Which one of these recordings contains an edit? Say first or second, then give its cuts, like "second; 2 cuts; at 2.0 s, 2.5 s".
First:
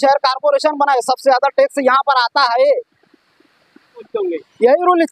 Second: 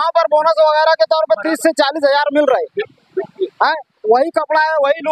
first; 1 cut; at 4.1 s